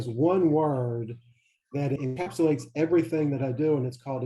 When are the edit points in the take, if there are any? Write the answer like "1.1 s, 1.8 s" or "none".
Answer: 2.0 s